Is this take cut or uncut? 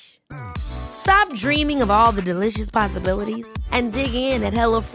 uncut